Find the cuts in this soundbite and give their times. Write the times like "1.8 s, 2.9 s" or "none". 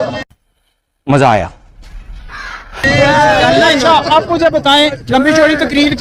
none